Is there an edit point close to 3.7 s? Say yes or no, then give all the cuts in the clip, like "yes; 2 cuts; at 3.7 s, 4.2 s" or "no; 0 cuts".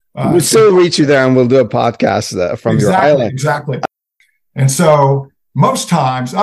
yes; 1 cut; at 3.7 s